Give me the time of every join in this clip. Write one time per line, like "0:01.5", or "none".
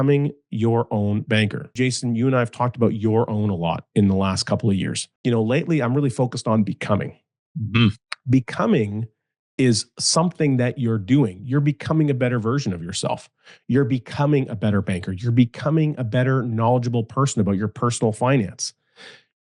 0:01.7
0:05.0